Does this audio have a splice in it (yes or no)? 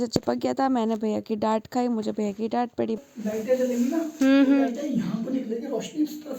no